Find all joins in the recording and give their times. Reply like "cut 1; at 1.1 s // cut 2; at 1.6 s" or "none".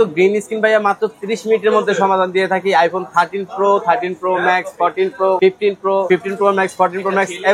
cut 1; at 5.7 s